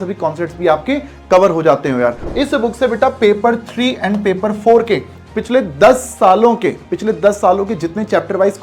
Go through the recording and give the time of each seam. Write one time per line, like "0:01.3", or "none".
0:02.2